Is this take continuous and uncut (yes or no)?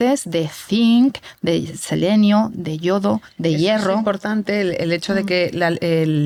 yes